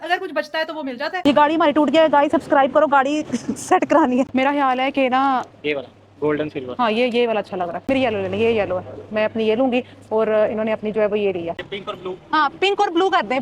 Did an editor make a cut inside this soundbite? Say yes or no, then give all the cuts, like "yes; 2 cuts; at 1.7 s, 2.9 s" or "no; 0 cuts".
yes; 4 cuts; at 1.2 s, 4.3 s, 7.8 s, 11.6 s